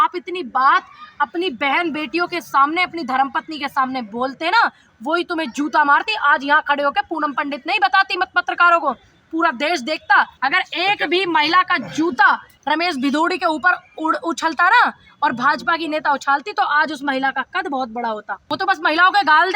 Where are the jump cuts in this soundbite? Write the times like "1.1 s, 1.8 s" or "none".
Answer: 10.3 s, 12.5 s, 18.3 s

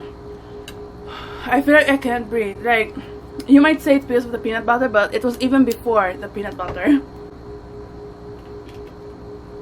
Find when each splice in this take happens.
none

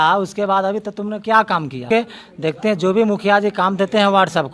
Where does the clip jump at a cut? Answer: 1.9 s

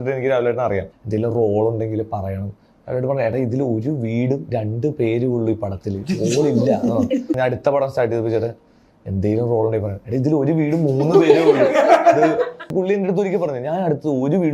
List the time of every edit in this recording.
1.0 s, 7.3 s, 12.7 s

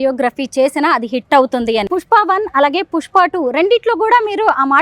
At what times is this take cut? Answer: 1.9 s

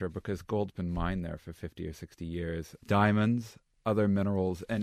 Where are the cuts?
none

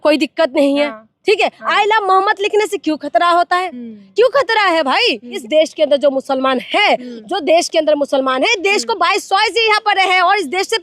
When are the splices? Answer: 5.4 s

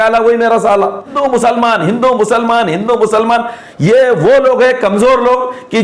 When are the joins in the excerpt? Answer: 1.1 s

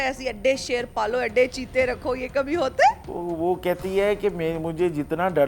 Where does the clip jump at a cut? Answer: 3.0 s

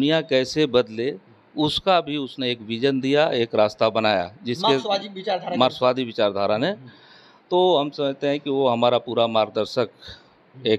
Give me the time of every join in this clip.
none

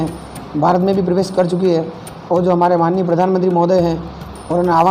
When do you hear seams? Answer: none

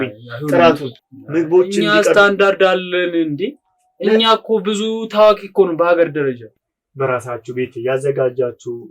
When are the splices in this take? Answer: 0.9 s, 6.5 s

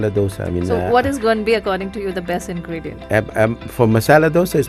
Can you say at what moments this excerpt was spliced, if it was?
none

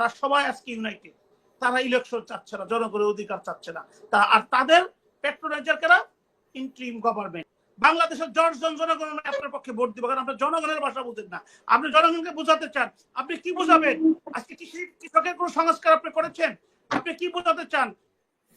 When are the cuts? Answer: 7.6 s

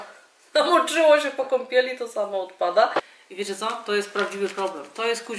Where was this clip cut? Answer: 3.0 s

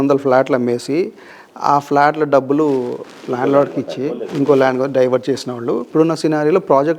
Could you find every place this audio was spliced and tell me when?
5.8 s

